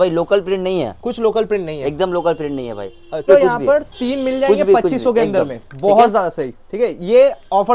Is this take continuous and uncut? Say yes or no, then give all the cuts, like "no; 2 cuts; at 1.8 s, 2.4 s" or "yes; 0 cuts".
no; 1 cut; at 3.3 s